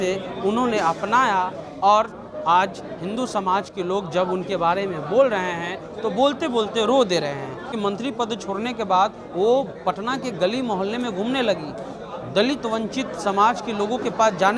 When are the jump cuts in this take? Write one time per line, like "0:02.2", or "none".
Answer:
0:07.7

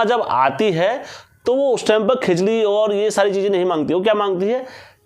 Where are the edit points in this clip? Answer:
none

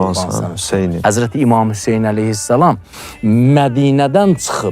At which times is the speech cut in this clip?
0:01.0

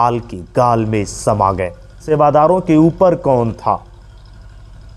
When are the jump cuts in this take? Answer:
0:02.0

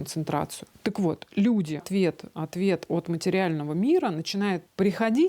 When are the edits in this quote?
0:01.9

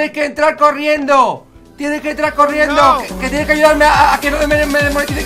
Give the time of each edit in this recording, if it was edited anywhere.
none

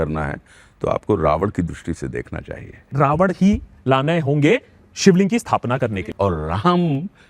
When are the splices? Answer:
0:02.9
0:06.0

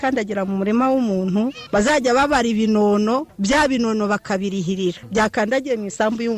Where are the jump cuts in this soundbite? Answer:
0:01.6
0:03.3
0:05.0

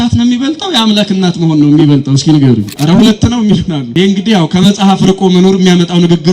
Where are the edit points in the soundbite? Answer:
0:02.7
0:03.8

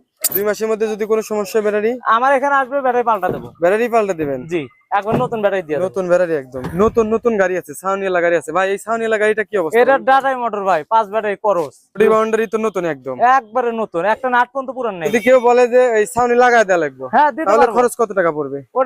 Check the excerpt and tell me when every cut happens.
0:06.6
0:12.0
0:15.0

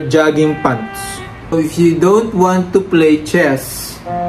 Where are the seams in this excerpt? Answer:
0:01.5

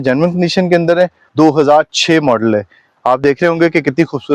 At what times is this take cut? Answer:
0:01.2

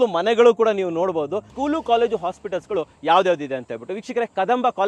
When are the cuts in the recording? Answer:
0:01.5

